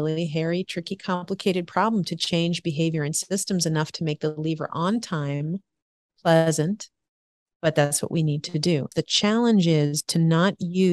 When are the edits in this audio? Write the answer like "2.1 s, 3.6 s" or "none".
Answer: 8.9 s